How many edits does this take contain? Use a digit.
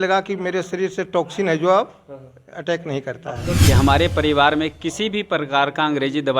1